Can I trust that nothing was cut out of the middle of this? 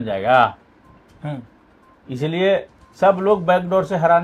yes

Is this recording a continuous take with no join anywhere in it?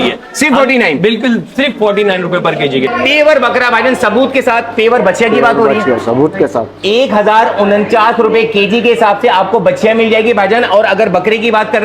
no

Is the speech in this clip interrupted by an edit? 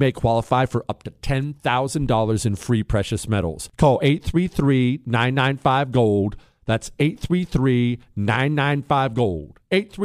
no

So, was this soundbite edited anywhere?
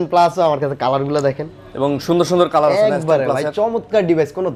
no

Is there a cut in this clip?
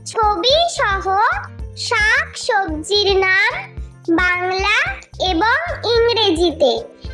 no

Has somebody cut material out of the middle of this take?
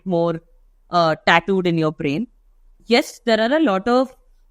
yes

